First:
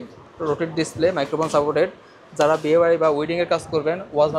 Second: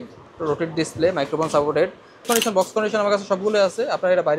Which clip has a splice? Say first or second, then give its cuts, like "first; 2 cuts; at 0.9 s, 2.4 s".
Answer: second; 1 cut; at 2.2 s